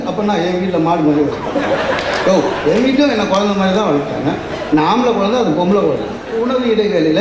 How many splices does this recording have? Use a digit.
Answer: 1